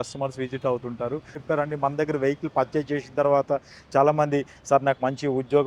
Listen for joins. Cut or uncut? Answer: cut